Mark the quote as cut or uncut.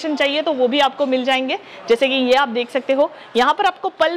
uncut